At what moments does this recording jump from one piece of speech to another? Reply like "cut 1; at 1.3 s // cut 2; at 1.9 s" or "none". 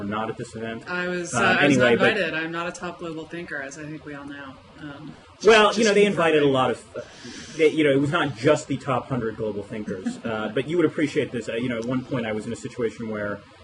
cut 1; at 7.6 s